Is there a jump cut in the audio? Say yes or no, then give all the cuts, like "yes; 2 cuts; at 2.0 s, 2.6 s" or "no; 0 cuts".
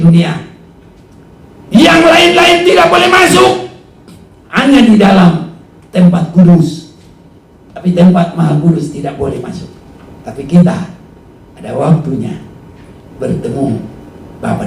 no; 0 cuts